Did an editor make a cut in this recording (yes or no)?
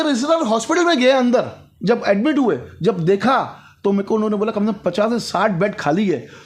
no